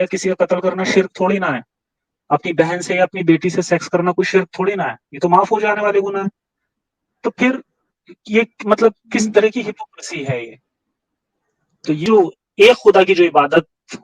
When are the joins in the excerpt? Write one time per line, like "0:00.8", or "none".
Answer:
0:12.0